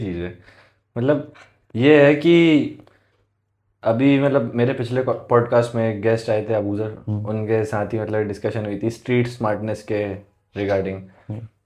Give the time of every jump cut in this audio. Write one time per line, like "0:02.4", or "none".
none